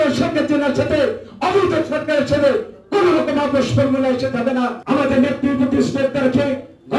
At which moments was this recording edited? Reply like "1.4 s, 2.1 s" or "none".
4.8 s